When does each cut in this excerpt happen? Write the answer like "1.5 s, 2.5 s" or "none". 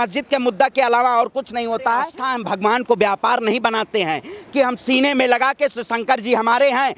2.2 s